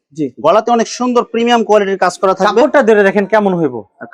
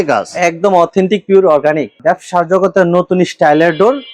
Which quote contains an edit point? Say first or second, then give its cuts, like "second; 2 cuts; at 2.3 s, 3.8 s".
second; 1 cut; at 2.0 s